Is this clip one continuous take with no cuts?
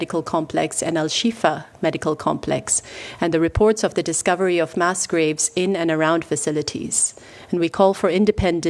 yes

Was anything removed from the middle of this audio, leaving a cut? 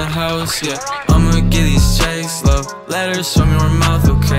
no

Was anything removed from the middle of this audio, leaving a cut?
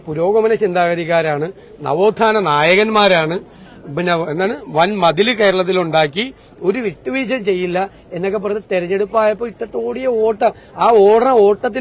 no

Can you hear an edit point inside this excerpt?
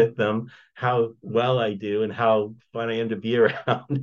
yes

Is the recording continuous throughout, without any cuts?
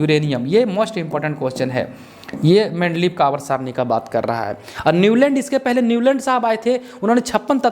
yes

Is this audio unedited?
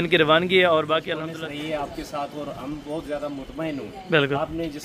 no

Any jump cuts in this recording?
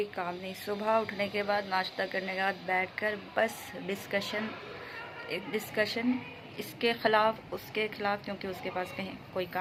no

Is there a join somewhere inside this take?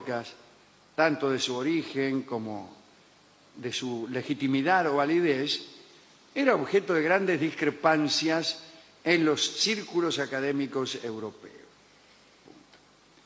yes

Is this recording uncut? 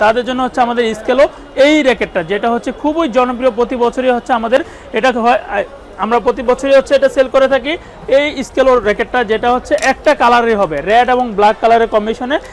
yes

